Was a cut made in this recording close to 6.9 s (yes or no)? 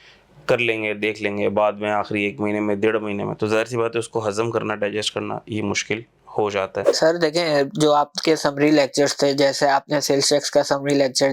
yes